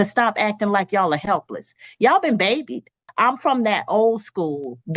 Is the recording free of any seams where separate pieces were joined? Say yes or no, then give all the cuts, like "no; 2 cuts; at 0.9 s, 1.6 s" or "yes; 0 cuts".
no; 1 cut; at 3.0 s